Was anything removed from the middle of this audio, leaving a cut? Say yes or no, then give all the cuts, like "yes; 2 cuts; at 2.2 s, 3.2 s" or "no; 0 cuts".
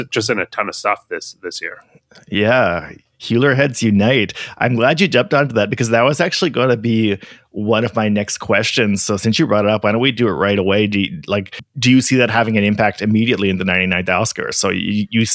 no; 0 cuts